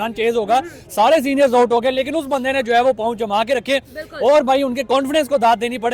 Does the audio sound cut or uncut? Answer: uncut